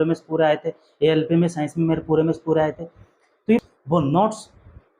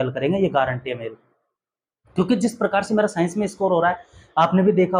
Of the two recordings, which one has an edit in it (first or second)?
first